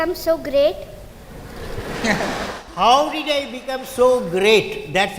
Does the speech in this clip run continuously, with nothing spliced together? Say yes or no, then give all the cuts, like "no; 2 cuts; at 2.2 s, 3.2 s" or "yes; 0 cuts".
yes; 0 cuts